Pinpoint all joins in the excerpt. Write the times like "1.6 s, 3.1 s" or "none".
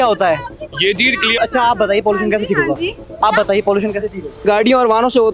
1.3 s, 4.4 s